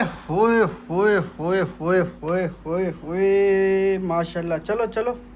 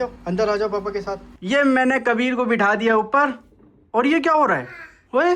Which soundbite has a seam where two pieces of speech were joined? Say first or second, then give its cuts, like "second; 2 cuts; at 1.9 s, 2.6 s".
second; 1 cut; at 1.3 s